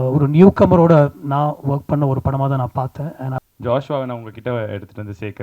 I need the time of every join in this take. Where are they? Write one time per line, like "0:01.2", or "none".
0:03.4

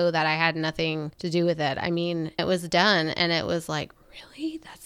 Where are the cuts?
0:01.1
0:02.4

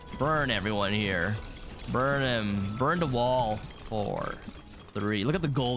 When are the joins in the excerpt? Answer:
0:03.7

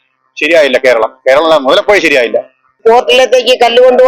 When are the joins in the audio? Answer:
0:02.7

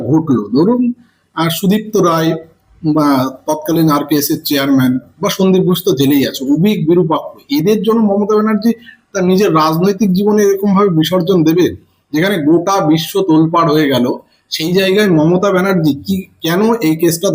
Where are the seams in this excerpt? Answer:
none

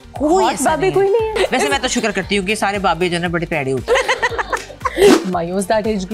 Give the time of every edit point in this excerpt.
0:01.3
0:03.9
0:05.2

